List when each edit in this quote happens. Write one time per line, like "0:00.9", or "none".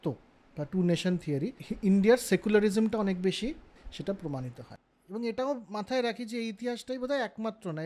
0:01.6
0:03.9
0:04.7